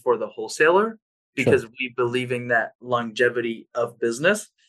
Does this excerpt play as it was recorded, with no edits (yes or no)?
yes